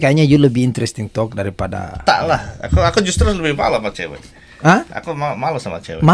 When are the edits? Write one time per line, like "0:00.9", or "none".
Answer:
none